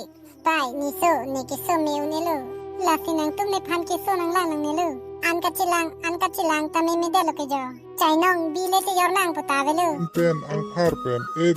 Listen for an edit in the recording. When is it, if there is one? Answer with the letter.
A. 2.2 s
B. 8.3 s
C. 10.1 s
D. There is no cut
C